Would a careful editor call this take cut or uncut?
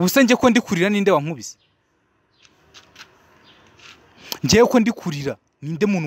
uncut